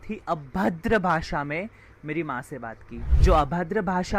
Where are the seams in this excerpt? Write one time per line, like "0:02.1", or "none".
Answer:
0:03.1